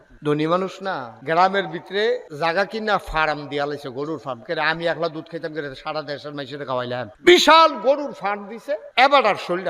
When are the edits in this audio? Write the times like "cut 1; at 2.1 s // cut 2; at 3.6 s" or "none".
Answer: cut 1; at 1.1 s // cut 2; at 2.3 s // cut 3; at 7.1 s // cut 4; at 8.8 s